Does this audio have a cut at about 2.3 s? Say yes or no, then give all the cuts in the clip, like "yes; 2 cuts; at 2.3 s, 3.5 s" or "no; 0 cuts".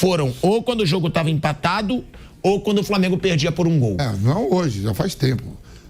no; 1 cut; at 4.1 s